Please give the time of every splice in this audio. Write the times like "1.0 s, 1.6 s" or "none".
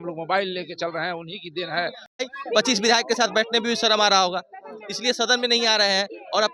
2.0 s